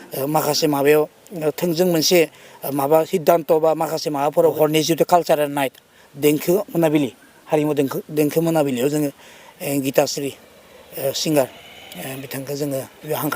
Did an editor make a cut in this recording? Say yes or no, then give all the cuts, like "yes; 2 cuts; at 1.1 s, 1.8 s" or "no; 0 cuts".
yes; 1 cut; at 4.5 s